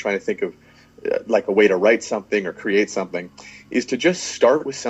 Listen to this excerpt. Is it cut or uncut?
uncut